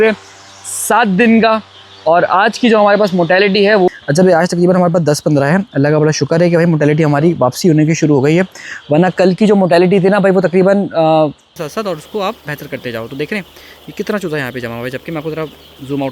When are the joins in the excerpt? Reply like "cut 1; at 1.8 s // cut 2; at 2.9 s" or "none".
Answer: cut 1; at 3.9 s // cut 2; at 11.5 s